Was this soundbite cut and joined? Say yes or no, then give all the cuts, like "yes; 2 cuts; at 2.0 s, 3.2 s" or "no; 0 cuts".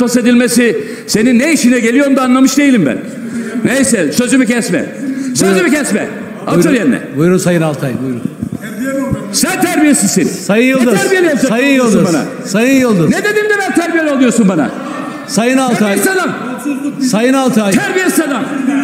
no; 0 cuts